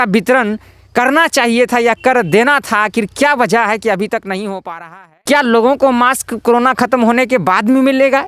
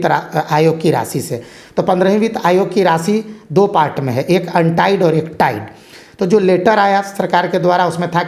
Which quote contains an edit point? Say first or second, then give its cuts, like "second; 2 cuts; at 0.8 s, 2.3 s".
first; 1 cut; at 5.1 s